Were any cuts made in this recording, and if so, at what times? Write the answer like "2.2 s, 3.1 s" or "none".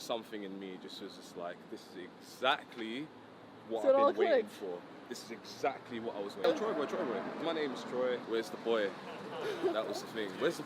6.4 s, 7.3 s, 8.2 s